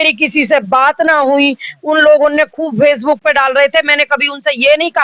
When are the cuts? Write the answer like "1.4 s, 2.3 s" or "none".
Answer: none